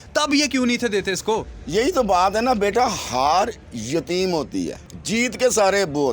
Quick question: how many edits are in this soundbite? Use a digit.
1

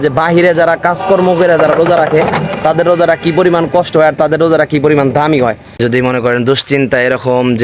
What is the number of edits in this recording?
1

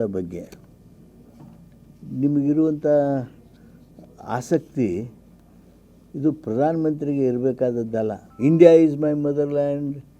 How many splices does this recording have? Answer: 1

